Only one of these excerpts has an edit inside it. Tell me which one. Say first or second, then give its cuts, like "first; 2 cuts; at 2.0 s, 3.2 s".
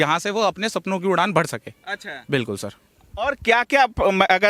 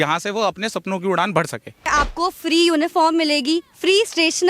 second; 1 cut; at 1.9 s